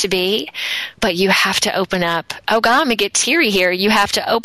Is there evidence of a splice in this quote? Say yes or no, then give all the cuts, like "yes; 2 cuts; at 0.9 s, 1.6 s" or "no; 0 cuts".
no; 0 cuts